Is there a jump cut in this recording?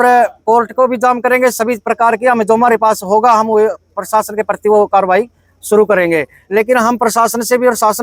no; 0 cuts

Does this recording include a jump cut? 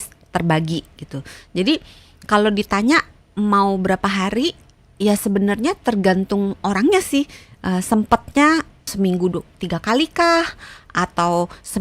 yes; 1 cut; at 8.8 s

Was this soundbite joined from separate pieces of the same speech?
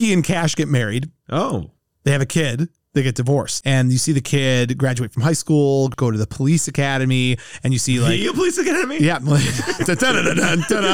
yes; 2 cuts; at 3.6 s, 5.9 s

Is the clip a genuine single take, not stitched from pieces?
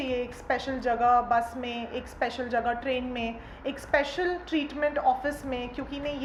yes; 0 cuts

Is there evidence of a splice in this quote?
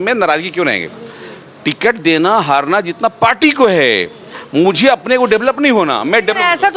no; 0 cuts

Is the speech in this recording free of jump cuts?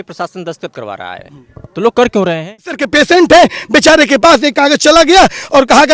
no; 1 cut; at 2.8 s

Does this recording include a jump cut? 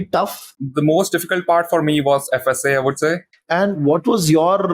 yes; 1 cut; at 3.3 s

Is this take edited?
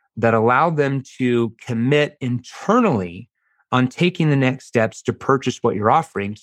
no; 0 cuts

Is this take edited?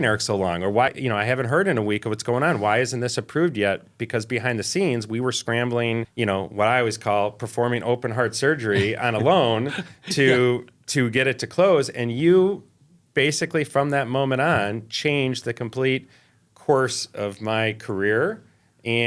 yes; 2 cuts; at 0.9 s, 6.1 s

